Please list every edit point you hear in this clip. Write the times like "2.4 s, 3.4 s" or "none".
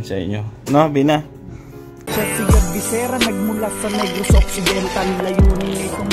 2.3 s

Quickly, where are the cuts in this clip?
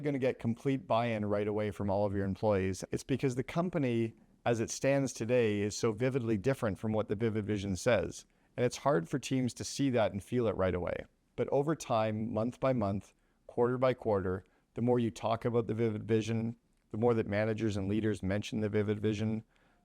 2.8 s

